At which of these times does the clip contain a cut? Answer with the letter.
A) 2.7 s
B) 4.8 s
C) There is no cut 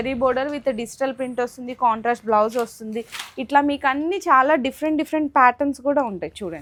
C